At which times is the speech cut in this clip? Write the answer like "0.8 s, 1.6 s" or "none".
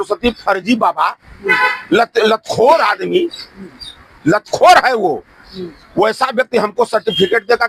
none